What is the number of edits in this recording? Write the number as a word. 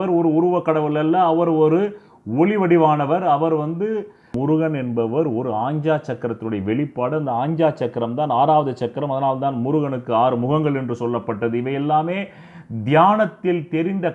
one